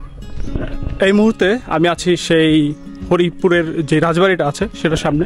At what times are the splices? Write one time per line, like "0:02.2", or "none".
none